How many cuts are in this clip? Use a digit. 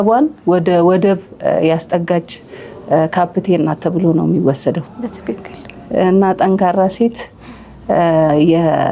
0